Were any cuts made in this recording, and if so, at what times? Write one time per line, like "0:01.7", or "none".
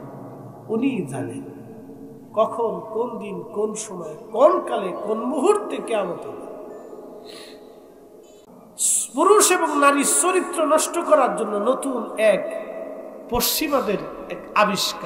0:08.5